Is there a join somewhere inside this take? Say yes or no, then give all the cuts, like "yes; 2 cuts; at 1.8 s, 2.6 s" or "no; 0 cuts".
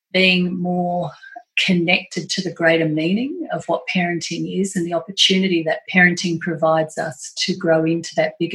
no; 0 cuts